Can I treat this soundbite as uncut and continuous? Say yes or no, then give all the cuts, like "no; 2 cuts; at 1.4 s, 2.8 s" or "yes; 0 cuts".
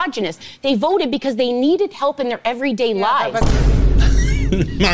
yes; 0 cuts